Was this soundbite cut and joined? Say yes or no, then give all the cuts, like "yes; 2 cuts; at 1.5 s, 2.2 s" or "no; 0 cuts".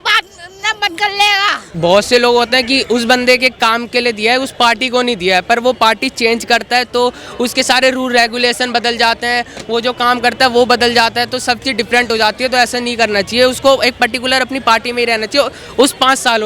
yes; 1 cut; at 1.7 s